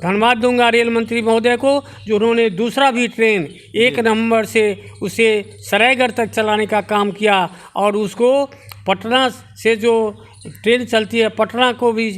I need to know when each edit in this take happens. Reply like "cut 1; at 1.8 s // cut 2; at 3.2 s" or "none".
none